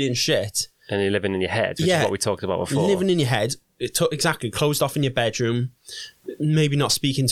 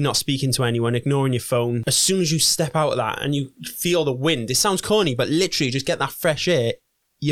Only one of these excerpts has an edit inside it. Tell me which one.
second; 1 cut; at 1.8 s

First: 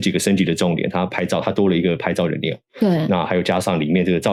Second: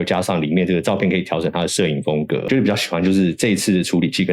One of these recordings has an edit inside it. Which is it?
second; 1 cut; at 2.5 s

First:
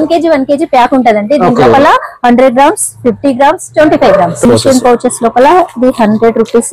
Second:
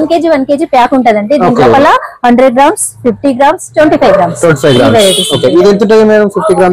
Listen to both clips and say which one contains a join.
first; 1 cut; at 4.5 s

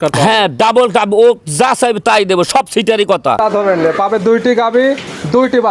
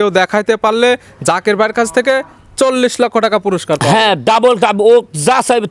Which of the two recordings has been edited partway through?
first; 1 cut; at 3.4 s

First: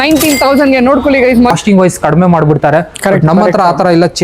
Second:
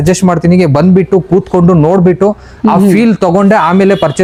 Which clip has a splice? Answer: first; 1 cut; at 1.5 s

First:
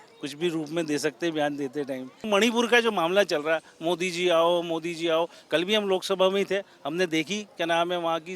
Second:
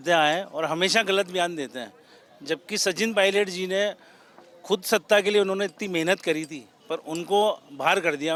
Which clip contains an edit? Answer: first; 1 cut; at 2.2 s

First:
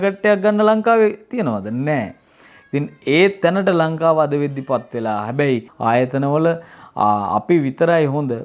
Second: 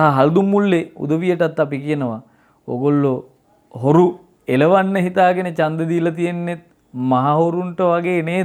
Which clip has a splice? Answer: first; 1 cut; at 5.7 s

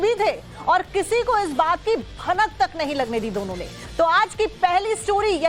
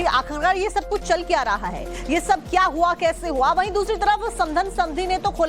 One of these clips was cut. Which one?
first; 1 cut; at 1.8 s

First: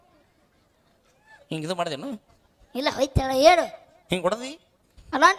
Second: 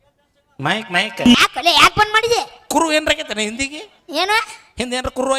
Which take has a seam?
second; 1 cut; at 1.3 s

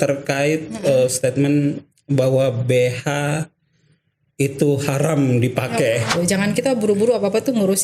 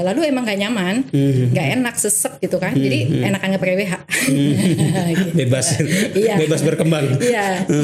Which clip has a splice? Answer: first; 1 cut; at 6.1 s

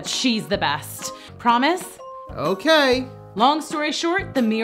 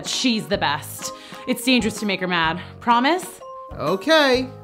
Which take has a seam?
first; 1 cut; at 1.3 s

